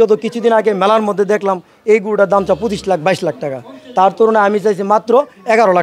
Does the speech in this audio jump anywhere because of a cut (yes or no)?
no